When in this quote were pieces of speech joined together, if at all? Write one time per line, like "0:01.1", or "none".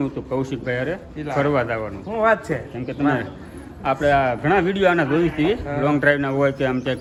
none